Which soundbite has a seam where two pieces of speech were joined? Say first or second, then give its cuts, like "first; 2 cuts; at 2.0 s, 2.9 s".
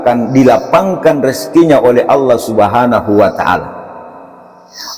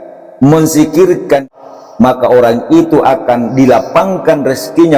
second; 1 cut; at 1.4 s